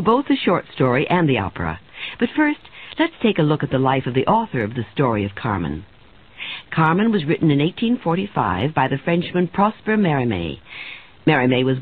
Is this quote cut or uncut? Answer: uncut